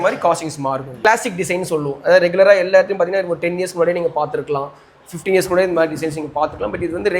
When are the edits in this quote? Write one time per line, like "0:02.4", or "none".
0:00.9